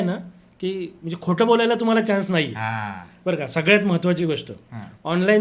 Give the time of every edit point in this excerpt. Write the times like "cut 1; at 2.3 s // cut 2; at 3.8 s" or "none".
none